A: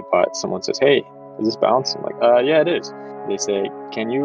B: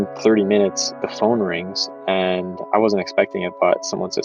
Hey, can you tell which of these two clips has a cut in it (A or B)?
A